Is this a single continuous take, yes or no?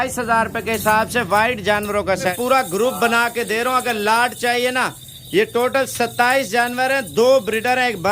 no